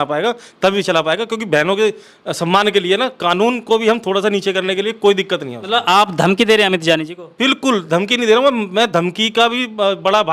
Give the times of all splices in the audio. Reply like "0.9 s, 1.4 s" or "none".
none